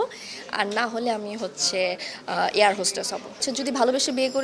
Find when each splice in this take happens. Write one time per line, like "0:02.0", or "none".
0:03.5

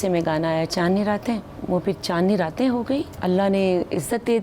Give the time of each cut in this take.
0:01.5
0:03.1

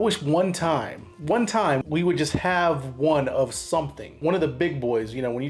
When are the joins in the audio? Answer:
0:01.8
0:04.2

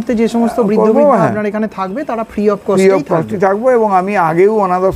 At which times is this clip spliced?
none

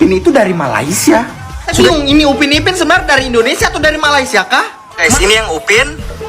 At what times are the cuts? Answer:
0:01.7
0:05.1

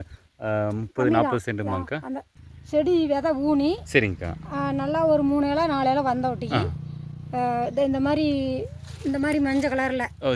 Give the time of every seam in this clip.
0:02.3

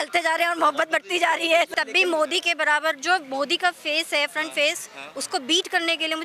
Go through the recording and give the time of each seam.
0:01.7

